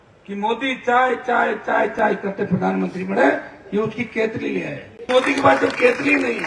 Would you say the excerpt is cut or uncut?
cut